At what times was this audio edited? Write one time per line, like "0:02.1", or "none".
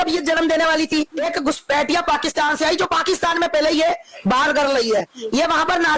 0:01.2